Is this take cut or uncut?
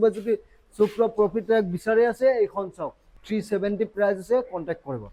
uncut